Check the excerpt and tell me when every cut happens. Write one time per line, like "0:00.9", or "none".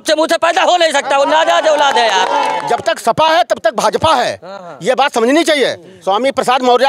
0:02.6
0:05.9